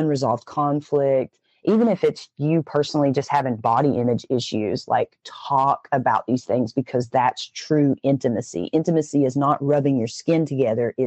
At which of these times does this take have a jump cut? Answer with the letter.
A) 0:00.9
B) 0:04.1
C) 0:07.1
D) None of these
D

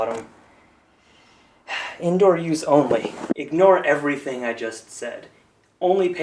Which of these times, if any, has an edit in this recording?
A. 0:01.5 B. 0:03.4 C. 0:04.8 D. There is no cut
B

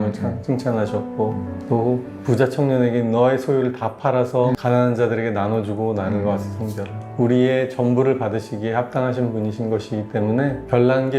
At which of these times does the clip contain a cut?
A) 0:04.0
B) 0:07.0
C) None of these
B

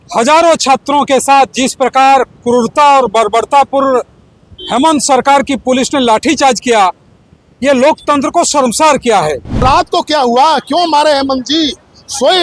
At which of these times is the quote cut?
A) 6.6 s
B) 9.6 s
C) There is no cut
B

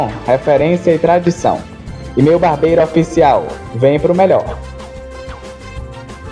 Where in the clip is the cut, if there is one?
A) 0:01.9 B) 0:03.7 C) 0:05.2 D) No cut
D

